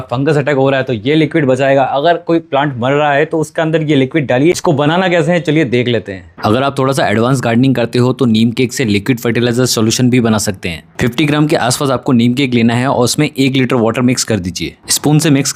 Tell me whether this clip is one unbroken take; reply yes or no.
yes